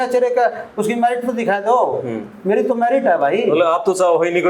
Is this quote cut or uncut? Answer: uncut